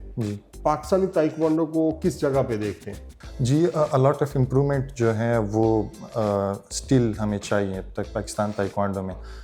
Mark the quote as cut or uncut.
uncut